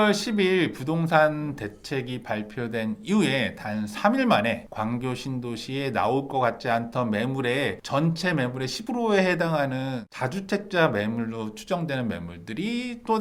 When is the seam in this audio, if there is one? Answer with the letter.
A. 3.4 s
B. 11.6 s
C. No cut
C